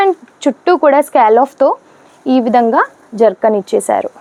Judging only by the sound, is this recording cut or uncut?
uncut